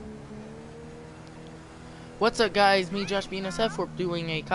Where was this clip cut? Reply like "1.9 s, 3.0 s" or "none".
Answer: 2.9 s